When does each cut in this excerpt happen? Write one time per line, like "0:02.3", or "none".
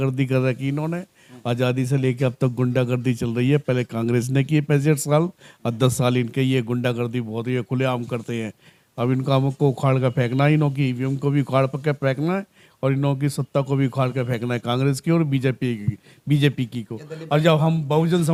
none